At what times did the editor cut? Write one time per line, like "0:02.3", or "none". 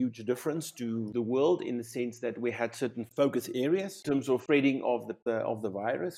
0:01.1
0:03.1
0:04.3
0:05.2